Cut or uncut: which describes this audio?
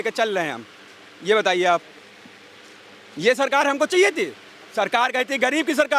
uncut